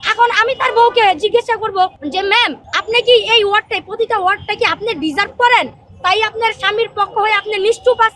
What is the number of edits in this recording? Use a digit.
2